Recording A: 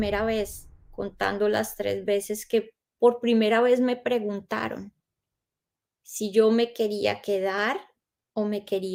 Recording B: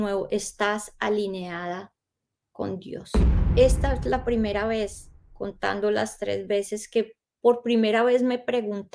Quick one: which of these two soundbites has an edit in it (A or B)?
B